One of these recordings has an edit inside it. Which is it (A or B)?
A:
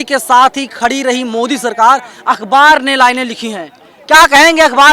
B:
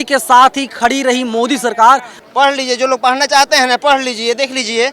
B